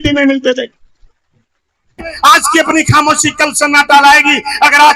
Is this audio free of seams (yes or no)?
no